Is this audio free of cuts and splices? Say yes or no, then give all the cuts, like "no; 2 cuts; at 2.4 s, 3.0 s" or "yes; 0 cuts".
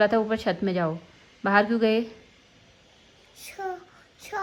yes; 0 cuts